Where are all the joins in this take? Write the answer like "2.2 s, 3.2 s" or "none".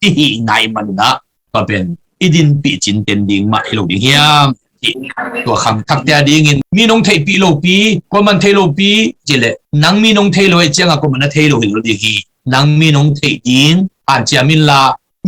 9.6 s